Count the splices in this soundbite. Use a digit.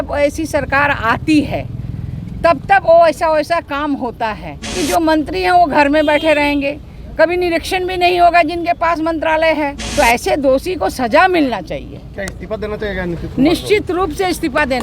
2